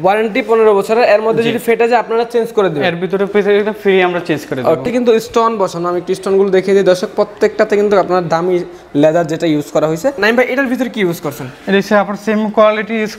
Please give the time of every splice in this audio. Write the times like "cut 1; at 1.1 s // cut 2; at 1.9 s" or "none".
cut 1; at 4.8 s // cut 2; at 10.2 s